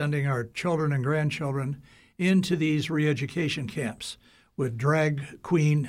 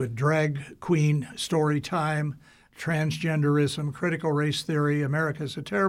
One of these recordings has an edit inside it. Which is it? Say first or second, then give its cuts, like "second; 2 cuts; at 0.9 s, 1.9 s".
second; 1 cut; at 2.7 s